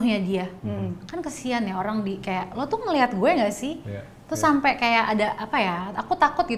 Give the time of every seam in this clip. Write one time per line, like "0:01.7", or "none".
none